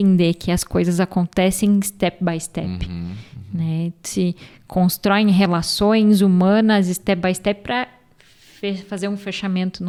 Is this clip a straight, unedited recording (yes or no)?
yes